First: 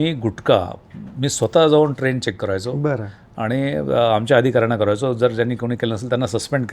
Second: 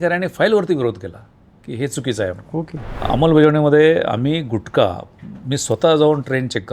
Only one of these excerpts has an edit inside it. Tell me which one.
second; 1 cut; at 3.0 s

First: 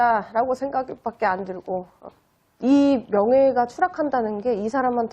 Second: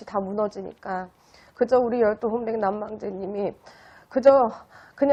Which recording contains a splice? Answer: first; 1 cut; at 2.0 s

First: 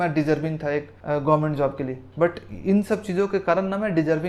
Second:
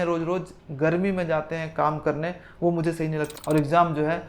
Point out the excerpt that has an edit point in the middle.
second; 1 cut; at 3.3 s

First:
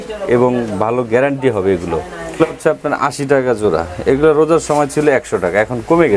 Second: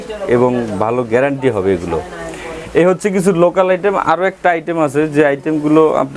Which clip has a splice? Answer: first; 1 cut; at 2.3 s

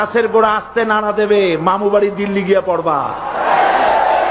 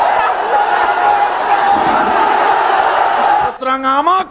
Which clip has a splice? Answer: second; 1 cut; at 3.3 s

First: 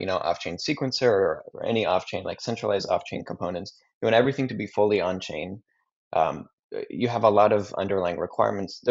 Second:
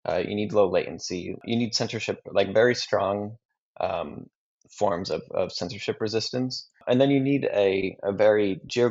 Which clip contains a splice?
second; 2 cuts; at 1.4 s, 6.8 s

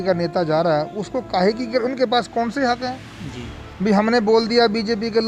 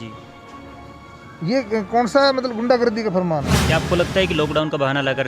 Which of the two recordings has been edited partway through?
second; 1 cut; at 3.6 s

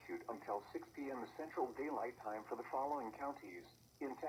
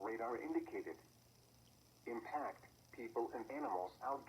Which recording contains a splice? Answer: second; 1 cut; at 2.7 s

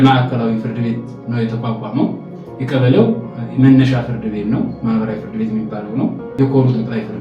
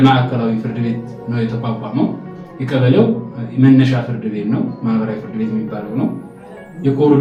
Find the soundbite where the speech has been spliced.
first; 1 cut; at 6.2 s

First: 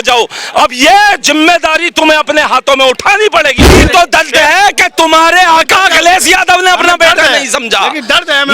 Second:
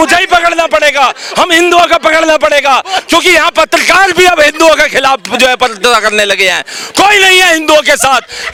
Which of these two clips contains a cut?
first; 1 cut; at 3.7 s

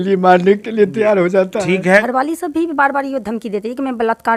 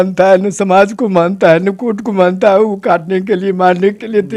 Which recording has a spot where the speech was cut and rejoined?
first; 1 cut; at 2.1 s

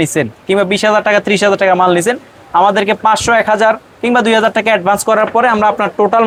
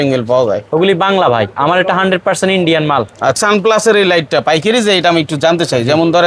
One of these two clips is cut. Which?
second; 1 cut; at 3.4 s

